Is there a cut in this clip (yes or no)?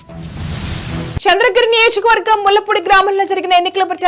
no